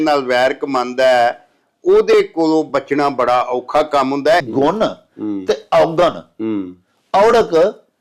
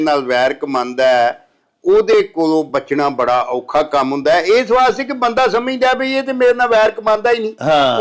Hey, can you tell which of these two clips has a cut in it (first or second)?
first